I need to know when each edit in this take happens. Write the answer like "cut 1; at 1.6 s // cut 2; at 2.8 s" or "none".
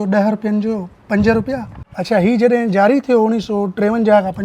cut 1; at 1.9 s

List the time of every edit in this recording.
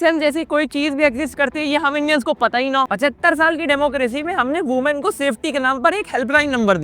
cut 1; at 2.9 s

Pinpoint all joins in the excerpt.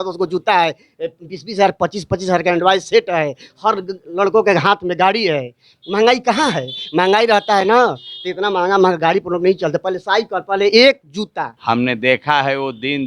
cut 1; at 11.5 s

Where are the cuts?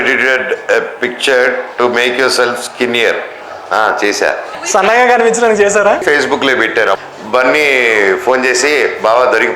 cut 1; at 4.5 s // cut 2; at 6.0 s // cut 3; at 7.0 s

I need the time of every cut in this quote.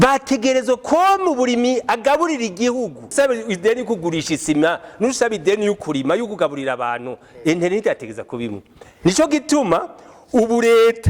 cut 1; at 3.1 s

